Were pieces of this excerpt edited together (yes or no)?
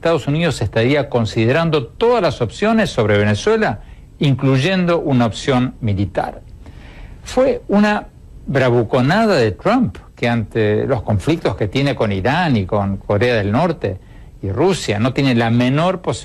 yes